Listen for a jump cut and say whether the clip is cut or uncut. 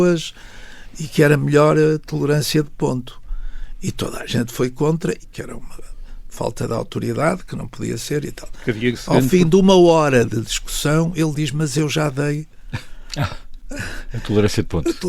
cut